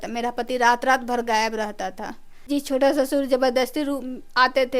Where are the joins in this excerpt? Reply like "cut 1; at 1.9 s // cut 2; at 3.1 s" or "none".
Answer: cut 1; at 2.3 s